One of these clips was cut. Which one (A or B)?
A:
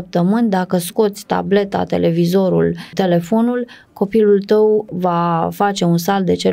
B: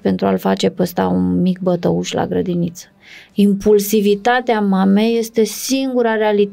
A